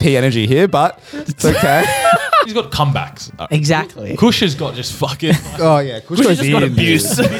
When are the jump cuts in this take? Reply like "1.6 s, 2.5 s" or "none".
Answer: 2.5 s